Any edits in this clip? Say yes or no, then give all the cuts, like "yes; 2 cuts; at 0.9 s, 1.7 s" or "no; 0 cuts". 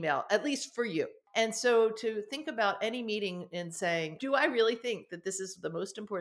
yes; 2 cuts; at 1.2 s, 4.2 s